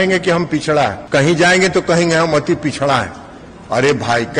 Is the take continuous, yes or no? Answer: no